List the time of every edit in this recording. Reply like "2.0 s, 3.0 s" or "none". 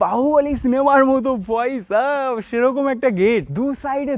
none